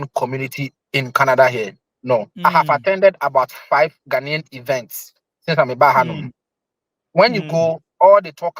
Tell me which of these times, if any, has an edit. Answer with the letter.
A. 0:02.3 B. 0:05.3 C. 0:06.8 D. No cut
A